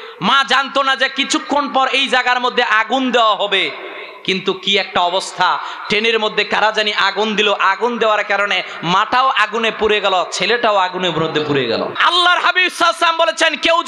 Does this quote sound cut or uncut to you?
cut